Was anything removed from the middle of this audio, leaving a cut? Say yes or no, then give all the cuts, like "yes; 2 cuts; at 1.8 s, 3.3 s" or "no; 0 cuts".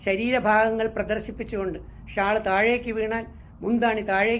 no; 0 cuts